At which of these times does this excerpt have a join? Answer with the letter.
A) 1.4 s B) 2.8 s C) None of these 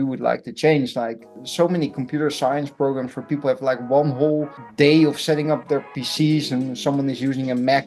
A